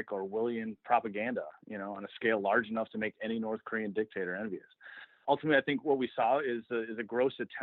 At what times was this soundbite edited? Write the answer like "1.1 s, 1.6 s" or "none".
5.2 s